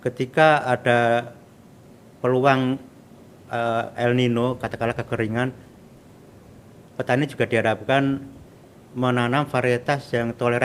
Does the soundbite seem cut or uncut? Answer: uncut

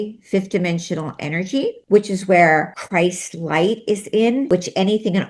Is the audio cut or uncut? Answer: cut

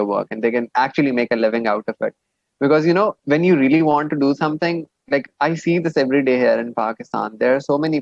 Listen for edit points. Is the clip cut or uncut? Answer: cut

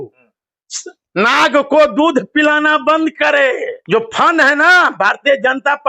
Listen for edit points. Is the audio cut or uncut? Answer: cut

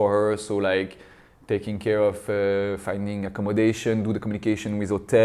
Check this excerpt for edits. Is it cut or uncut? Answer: uncut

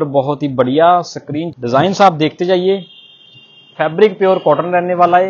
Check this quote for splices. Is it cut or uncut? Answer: cut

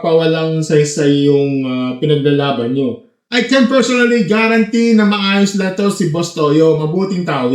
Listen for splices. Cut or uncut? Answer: cut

